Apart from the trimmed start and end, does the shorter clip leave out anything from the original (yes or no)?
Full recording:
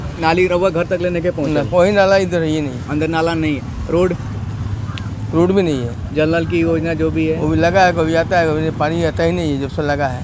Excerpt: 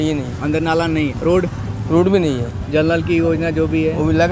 yes